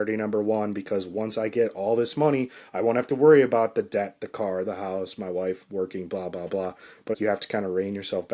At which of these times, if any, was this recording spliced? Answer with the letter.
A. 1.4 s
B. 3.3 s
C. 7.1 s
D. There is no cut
C